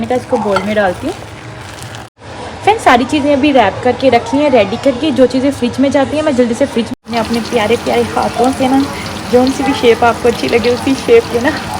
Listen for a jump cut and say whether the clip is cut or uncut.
cut